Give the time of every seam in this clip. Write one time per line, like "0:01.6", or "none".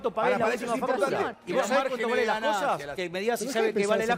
0:01.3
0:03.0